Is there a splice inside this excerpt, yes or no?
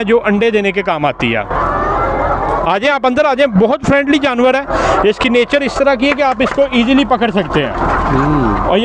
no